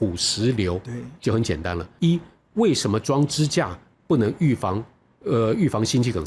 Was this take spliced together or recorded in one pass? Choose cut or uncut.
cut